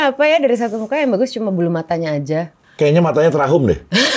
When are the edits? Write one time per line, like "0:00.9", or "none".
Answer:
0:02.6